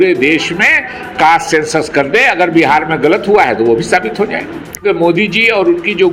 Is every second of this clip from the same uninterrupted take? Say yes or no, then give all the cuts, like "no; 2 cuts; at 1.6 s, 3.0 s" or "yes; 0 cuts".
no; 1 cut; at 4.8 s